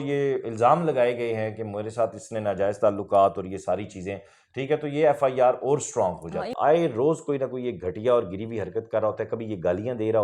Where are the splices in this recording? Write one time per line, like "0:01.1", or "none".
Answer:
0:06.5

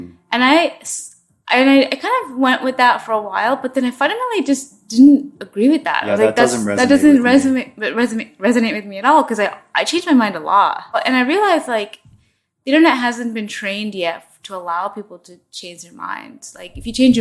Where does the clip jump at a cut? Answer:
0:11.0

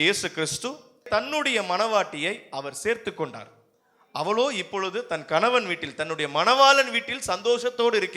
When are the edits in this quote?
0:01.1

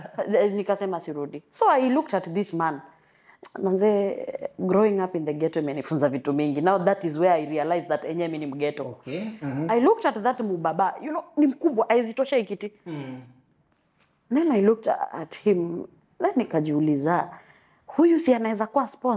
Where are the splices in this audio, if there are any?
none

